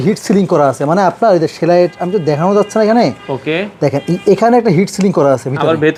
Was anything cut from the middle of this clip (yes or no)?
no